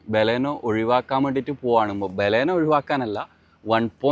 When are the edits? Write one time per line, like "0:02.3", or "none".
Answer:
none